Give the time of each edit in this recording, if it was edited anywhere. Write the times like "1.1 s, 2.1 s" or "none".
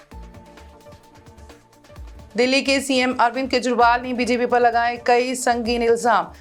none